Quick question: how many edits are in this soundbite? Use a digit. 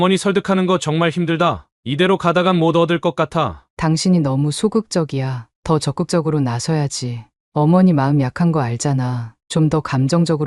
1